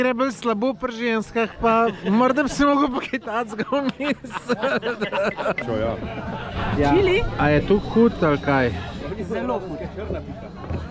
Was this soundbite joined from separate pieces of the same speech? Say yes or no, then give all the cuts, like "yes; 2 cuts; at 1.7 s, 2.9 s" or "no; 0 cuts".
yes; 1 cut; at 5.6 s